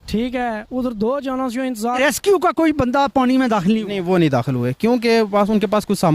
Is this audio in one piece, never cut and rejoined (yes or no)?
no